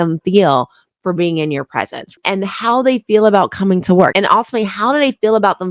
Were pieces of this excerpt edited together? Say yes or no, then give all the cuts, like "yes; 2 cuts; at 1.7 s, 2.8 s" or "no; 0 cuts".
yes; 2 cuts; at 2.0 s, 4.1 s